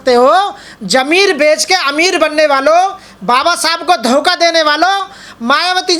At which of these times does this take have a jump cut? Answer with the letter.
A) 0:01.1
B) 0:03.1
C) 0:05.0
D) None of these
D